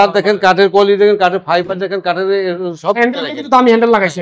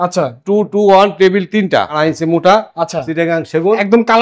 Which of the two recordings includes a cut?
second; 1 cut; at 2.0 s

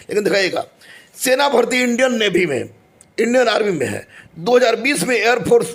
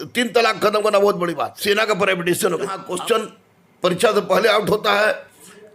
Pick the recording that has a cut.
second; 2 cuts; at 1.5 s, 2.8 s

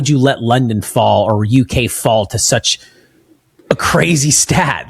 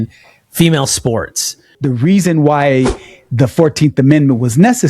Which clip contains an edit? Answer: second; 1 cut; at 1.7 s

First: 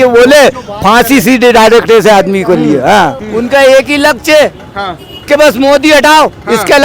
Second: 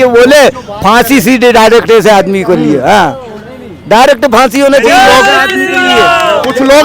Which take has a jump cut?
first; 1 cut; at 3.2 s

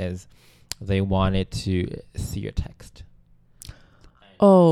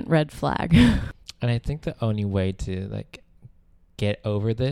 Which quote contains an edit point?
second; 1 cut; at 1.0 s

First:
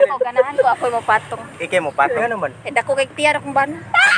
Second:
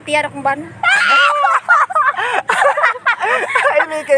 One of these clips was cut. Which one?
first; 1 cut; at 2.2 s

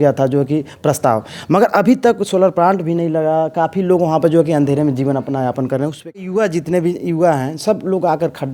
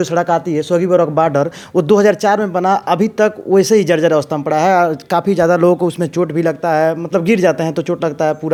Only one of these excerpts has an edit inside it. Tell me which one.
first; 1 cut; at 6.3 s

